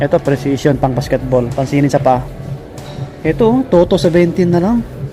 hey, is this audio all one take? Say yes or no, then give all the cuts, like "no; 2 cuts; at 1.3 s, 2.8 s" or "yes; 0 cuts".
yes; 0 cuts